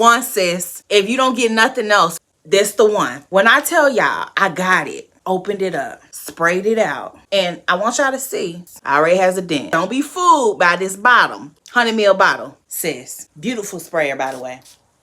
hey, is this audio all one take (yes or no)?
no